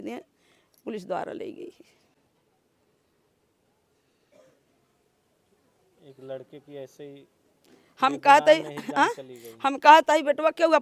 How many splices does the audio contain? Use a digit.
0